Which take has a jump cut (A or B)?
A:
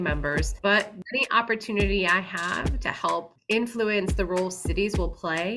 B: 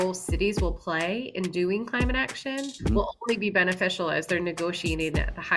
A